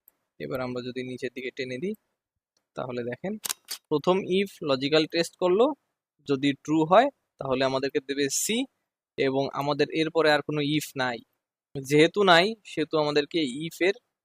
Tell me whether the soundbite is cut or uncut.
cut